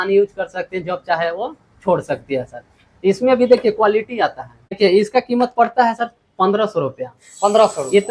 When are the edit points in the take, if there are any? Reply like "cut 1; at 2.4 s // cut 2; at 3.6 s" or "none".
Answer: cut 1; at 4.8 s